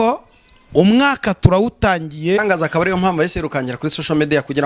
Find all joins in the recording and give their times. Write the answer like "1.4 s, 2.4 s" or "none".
2.4 s